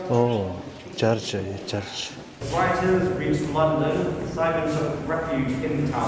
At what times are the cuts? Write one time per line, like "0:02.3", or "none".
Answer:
none